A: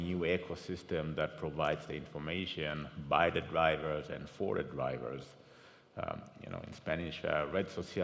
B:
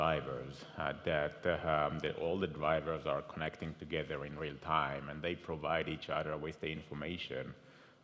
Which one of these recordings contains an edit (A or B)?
B